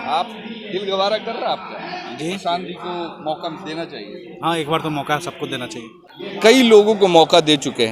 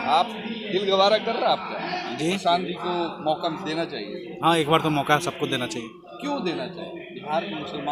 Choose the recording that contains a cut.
first; 1 cut; at 6.2 s

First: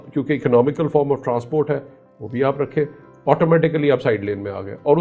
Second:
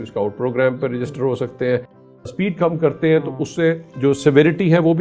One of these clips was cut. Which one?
second; 1 cut; at 2.3 s

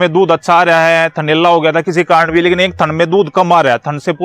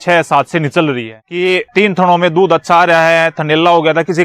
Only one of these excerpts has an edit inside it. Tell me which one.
second; 1 cut; at 1.3 s

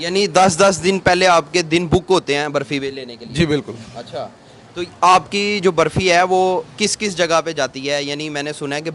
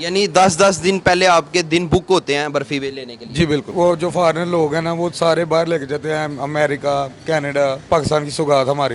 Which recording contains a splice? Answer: second; 2 cuts; at 3.7 s, 7.8 s

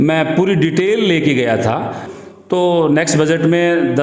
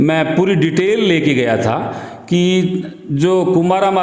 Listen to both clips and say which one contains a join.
first; 1 cut; at 2.1 s

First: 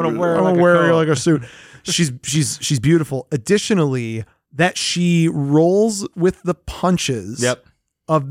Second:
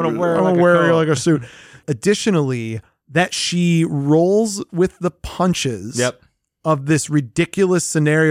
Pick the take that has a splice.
second; 1 cut; at 1.8 s

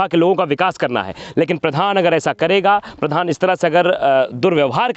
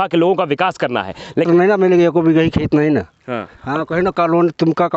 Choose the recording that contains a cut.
second; 1 cut; at 1.4 s

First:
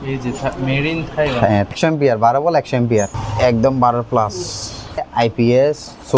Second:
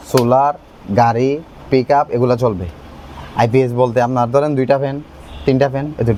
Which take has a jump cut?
first; 3 cuts; at 1.7 s, 3.2 s, 5.0 s

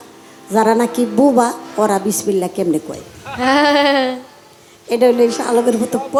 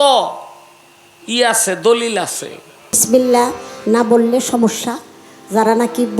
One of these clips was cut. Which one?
second; 1 cut; at 3.0 s

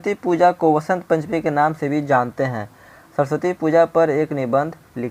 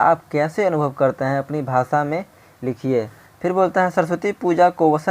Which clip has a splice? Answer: second; 1 cut; at 3.2 s

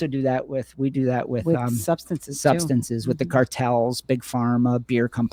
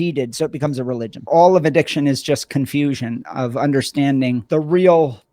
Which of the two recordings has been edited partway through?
second; 2 cuts; at 1.3 s, 4.4 s

